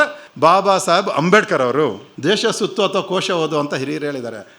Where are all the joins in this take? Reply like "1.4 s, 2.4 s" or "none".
2.2 s